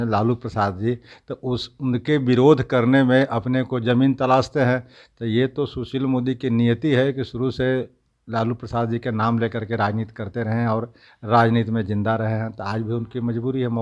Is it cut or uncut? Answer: uncut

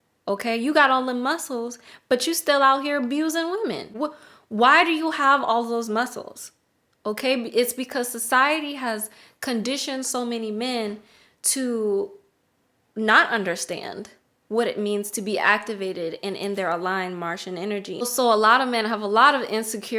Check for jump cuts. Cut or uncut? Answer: cut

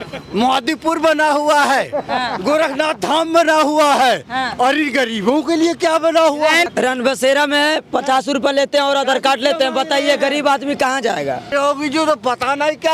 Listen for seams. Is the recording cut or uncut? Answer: cut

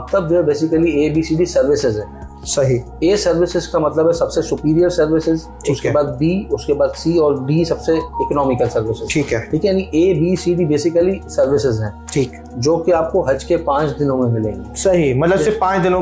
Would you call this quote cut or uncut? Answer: uncut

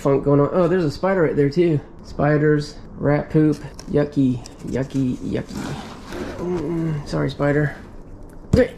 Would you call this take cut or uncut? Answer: uncut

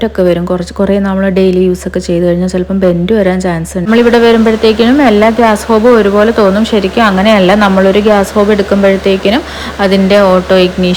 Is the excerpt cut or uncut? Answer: cut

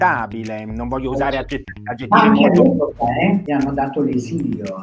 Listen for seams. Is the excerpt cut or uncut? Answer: cut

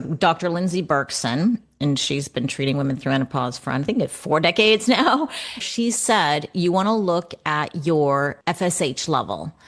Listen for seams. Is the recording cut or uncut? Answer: cut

